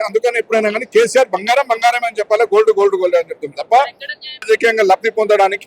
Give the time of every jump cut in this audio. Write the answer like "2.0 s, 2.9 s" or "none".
4.5 s